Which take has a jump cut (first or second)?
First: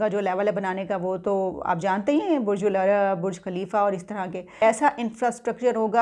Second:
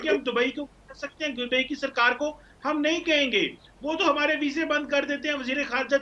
first